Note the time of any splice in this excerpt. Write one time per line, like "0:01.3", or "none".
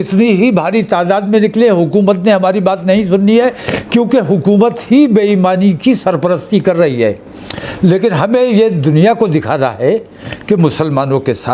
none